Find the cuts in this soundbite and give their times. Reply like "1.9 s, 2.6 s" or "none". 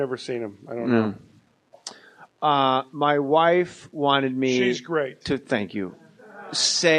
none